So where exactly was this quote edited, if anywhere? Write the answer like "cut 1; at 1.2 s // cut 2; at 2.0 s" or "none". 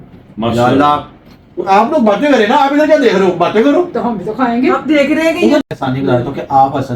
cut 1; at 5.6 s